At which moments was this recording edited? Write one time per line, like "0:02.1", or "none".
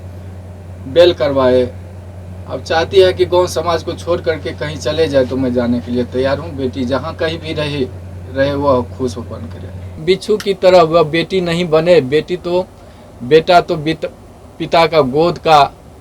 0:09.9